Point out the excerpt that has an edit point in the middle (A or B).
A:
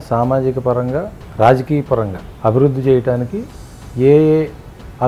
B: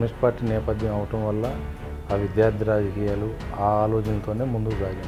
A